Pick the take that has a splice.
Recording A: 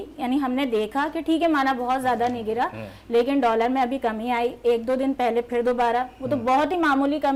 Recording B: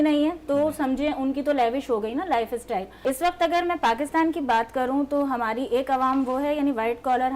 B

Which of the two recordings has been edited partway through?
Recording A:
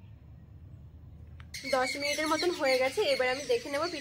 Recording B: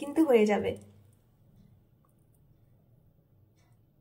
A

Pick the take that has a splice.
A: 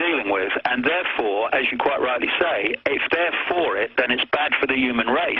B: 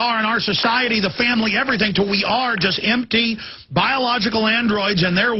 B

